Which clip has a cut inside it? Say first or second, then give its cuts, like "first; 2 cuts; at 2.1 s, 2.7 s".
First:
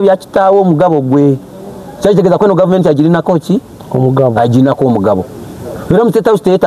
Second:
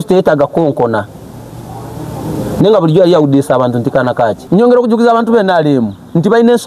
second; 1 cut; at 4.4 s